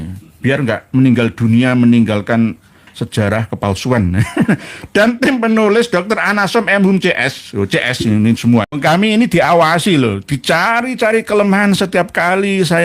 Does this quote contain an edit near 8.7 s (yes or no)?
yes